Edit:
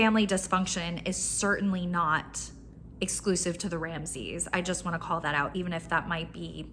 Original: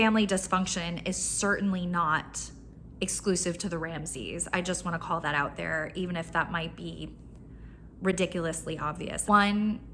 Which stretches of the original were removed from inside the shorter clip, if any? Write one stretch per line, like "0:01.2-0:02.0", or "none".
0:05.5-0:05.9